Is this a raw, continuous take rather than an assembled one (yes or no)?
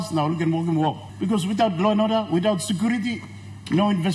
no